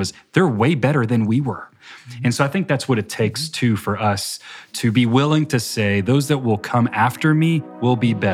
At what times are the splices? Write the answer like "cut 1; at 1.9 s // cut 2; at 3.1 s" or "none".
cut 1; at 4.7 s